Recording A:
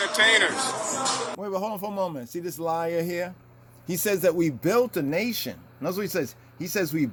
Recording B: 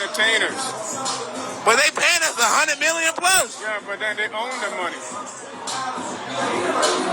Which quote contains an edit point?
B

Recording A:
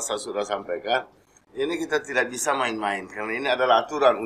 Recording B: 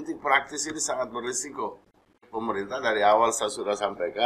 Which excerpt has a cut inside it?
B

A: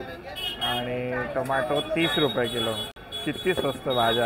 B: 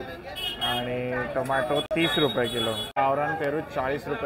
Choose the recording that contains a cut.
B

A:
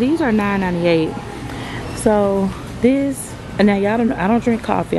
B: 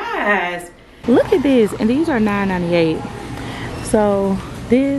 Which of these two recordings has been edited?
B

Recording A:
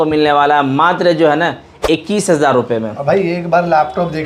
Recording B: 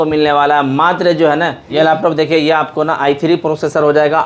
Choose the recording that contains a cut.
B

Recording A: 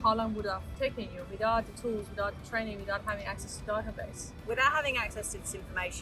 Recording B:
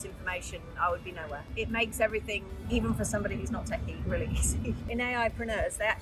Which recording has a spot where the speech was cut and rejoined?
B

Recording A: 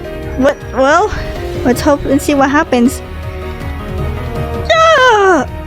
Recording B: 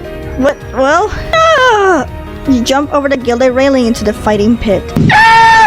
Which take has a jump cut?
B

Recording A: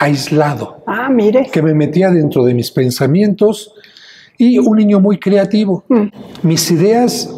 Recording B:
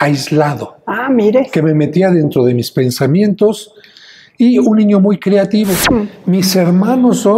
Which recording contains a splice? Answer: B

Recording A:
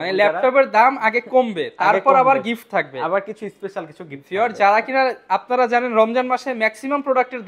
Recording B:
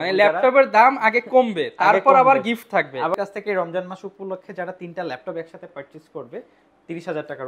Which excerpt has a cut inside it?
B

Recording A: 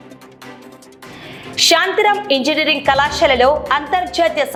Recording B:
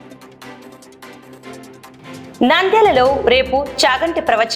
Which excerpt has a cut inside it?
B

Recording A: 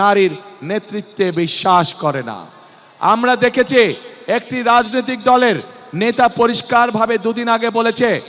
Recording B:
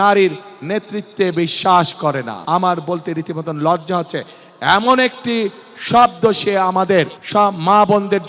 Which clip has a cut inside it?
B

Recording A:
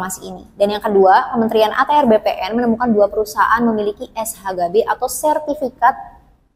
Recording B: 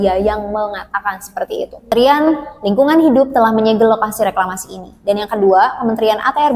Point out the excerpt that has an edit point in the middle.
B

